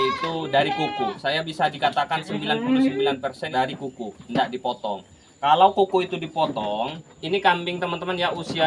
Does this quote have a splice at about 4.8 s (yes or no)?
no